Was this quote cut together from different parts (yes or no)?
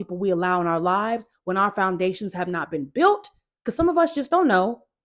no